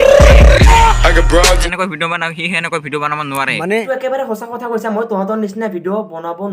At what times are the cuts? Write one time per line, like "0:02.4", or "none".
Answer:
0:01.6
0:03.8